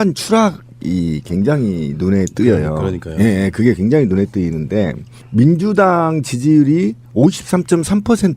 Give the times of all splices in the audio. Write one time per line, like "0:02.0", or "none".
0:06.3